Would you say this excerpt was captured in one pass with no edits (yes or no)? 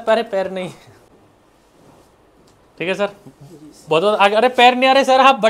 no